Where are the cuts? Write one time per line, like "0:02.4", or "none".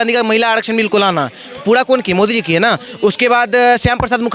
none